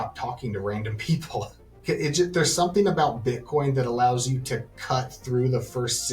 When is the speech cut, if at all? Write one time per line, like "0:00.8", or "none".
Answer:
0:01.7